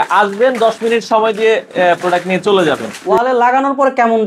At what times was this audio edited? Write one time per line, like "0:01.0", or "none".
0:02.9

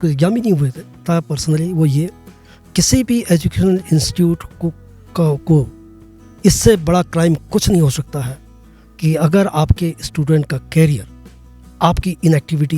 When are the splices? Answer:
0:01.0

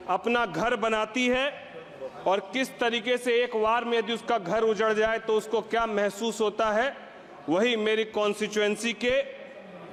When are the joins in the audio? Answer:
none

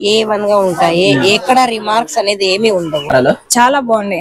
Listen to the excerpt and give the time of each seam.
0:03.1

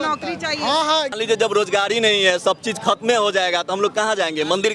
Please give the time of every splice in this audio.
0:01.1

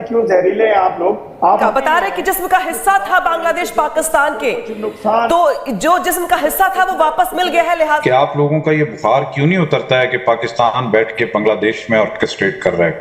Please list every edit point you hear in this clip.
0:01.7
0:08.0

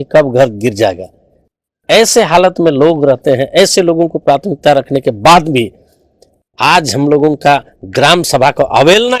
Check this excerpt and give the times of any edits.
none

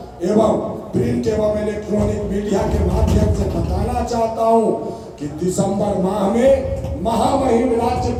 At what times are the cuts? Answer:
none

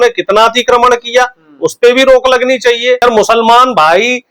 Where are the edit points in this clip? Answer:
0:03.0

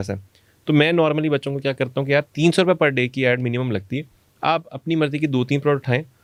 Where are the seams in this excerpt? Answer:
none

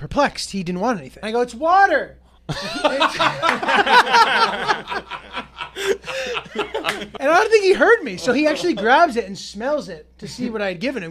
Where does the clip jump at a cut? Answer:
0:01.1
0:07.1

